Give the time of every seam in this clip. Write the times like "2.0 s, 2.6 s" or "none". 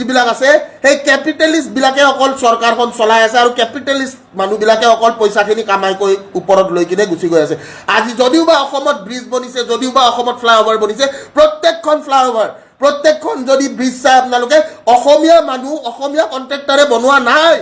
none